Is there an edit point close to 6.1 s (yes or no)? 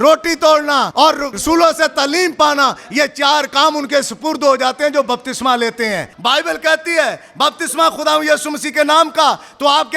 yes